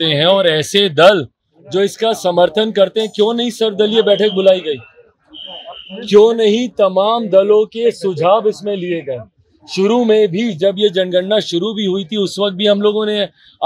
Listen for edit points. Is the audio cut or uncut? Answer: uncut